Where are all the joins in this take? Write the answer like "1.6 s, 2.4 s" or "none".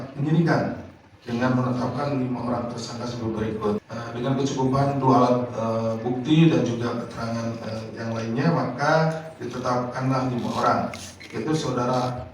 3.8 s